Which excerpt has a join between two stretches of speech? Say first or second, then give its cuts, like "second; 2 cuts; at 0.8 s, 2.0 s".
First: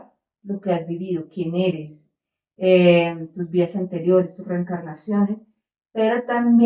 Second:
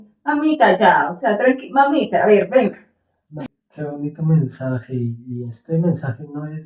second; 1 cut; at 3.4 s